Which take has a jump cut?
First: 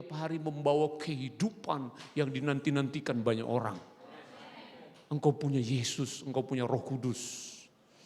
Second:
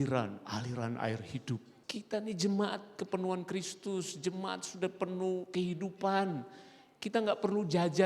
second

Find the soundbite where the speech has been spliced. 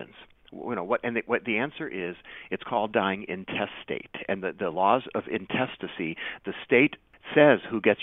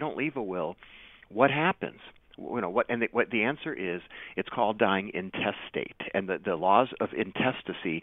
first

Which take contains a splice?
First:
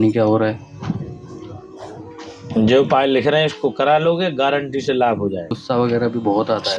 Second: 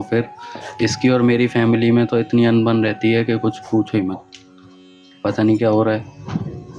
first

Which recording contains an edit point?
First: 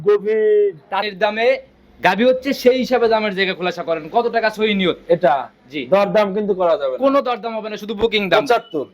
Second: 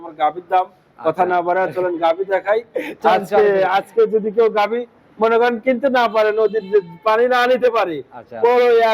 first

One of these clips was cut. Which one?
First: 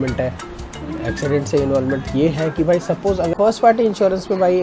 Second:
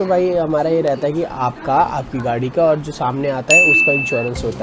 first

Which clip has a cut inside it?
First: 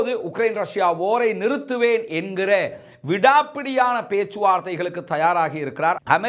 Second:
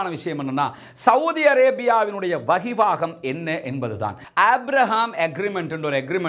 second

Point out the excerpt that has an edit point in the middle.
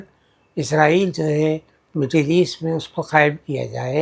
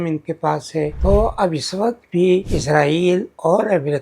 second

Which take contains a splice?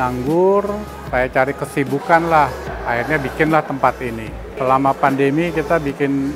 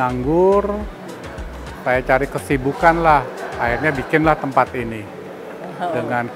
first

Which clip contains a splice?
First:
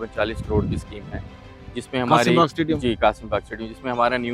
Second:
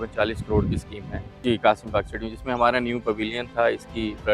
second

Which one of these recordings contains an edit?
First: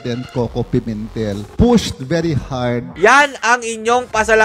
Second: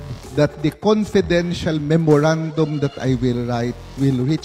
first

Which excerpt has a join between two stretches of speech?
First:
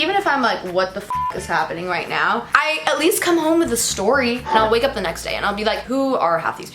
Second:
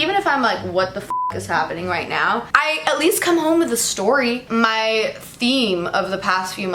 first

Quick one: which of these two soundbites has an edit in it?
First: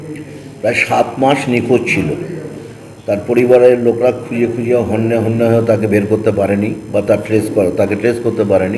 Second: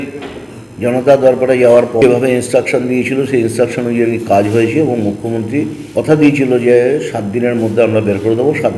second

